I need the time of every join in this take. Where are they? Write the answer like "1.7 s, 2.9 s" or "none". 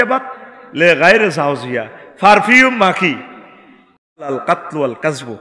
4.3 s